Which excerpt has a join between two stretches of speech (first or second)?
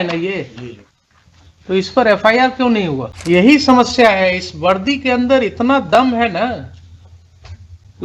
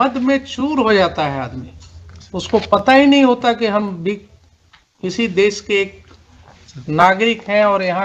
first